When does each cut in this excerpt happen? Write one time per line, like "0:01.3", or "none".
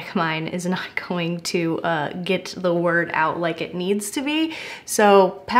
none

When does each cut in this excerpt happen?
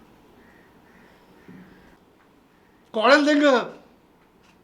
0:02.0

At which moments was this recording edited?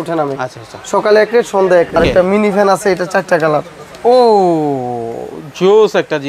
0:02.0

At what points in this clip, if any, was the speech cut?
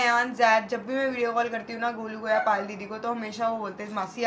none

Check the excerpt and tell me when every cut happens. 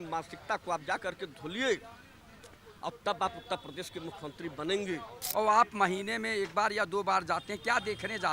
0:05.2

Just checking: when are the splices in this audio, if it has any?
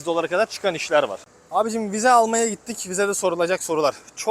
0:01.2

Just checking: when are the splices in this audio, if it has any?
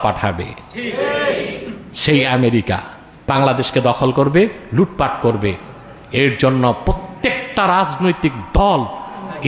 0:03.2

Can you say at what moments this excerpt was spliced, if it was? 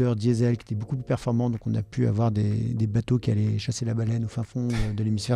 none

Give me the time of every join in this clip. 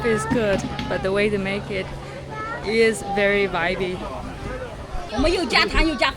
0:05.0

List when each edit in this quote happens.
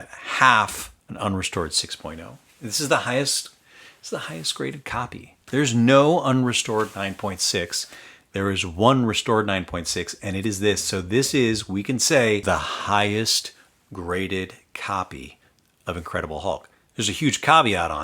0:02.4
0:05.4
0:12.4

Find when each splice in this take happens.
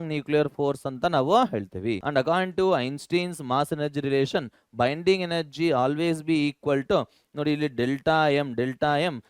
0:02.0

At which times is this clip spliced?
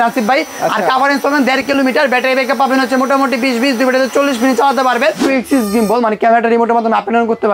0:05.2

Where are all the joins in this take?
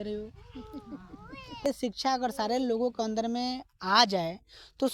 0:01.7

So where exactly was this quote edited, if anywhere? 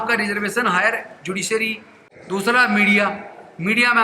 none

